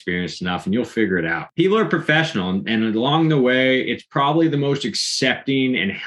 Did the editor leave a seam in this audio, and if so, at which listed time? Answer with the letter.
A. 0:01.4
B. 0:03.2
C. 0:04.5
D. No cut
A